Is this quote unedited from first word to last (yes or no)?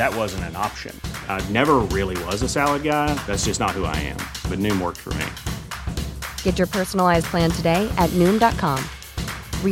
yes